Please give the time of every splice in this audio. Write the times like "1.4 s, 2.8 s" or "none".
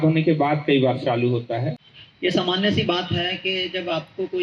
1.8 s

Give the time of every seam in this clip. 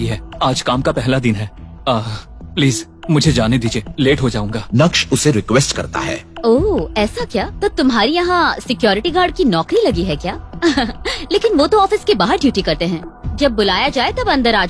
none

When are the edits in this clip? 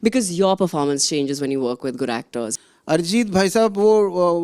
2.5 s

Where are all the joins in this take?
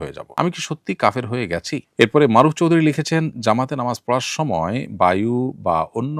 1.8 s

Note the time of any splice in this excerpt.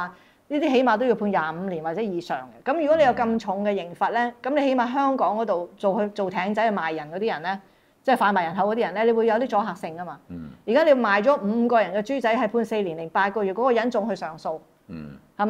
none

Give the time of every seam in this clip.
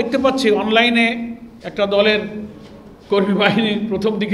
none

